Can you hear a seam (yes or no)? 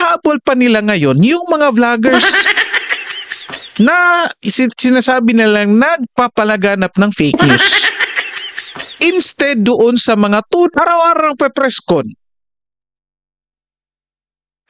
yes